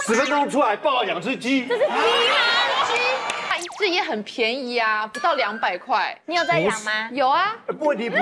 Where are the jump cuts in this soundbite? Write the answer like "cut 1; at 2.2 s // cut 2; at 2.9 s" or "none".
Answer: cut 1; at 3.5 s